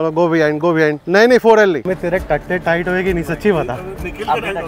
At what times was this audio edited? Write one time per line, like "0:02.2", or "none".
0:01.0
0:01.9